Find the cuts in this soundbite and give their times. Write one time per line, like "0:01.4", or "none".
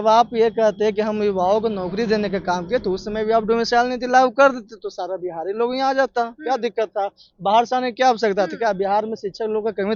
none